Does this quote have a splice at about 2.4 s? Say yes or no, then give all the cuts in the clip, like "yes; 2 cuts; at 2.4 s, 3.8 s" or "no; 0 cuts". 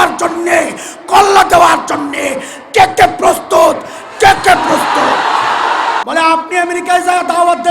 no; 1 cut; at 6.0 s